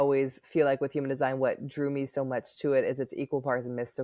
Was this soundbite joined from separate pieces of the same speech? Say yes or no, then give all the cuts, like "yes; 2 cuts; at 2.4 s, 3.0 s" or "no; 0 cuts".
no; 0 cuts